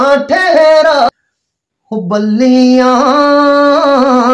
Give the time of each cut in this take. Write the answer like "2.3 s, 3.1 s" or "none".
1.0 s